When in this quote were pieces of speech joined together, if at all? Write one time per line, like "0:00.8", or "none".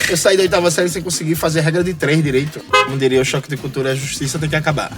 0:02.6